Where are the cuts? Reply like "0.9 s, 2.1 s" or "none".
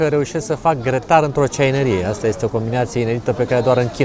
none